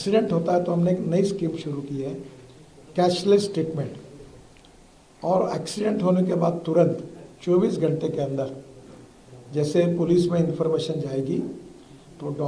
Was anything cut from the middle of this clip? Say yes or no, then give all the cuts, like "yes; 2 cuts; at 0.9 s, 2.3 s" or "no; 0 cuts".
no; 0 cuts